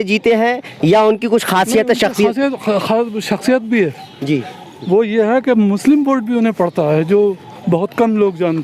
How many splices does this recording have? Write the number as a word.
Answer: zero